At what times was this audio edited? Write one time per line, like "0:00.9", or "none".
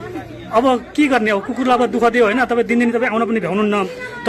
none